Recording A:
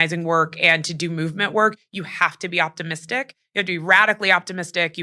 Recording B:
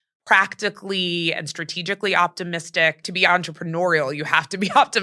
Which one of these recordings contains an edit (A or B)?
B